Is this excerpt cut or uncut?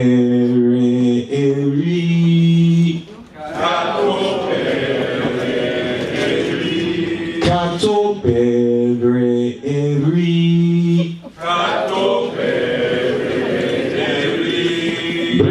cut